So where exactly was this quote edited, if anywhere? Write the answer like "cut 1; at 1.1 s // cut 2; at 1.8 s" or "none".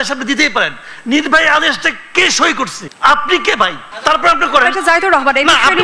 cut 1; at 2.8 s // cut 2; at 3.8 s